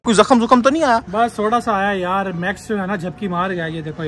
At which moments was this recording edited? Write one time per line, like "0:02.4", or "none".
none